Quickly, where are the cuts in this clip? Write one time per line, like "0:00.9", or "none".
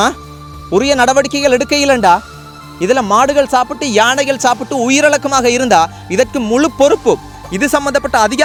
none